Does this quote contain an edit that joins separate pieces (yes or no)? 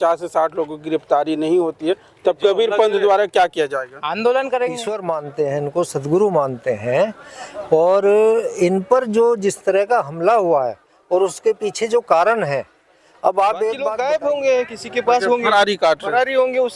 yes